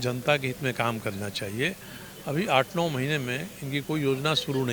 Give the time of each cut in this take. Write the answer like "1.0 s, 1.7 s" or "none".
none